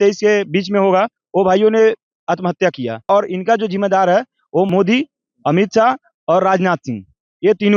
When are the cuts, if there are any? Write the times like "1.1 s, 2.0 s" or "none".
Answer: 3.1 s, 4.7 s